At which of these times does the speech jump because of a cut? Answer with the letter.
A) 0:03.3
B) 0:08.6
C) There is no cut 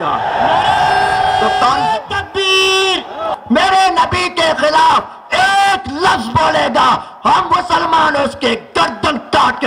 A